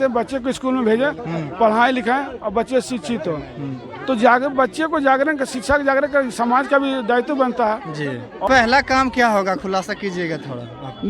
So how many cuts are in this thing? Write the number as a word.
one